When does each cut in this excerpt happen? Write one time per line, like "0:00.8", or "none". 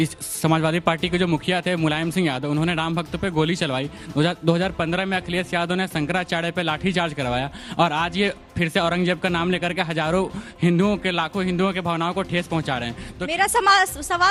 none